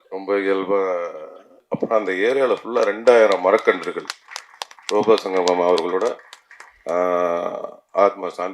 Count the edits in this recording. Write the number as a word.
one